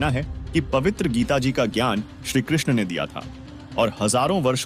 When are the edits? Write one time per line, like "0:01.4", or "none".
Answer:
none

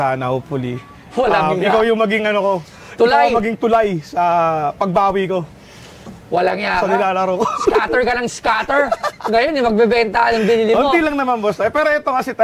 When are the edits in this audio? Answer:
none

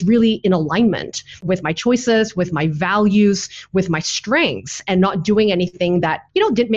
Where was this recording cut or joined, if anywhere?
0:01.4

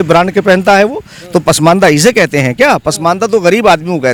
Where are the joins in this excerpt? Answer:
none

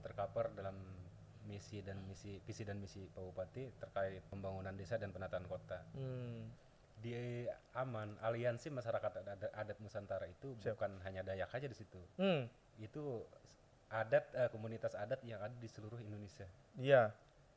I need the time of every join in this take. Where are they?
0:04.3
0:06.4

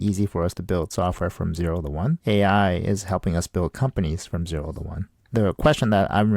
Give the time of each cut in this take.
0:02.2
0:05.2

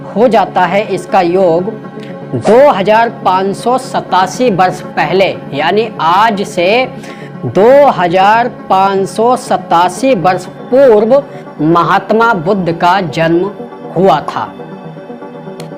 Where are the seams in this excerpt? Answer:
none

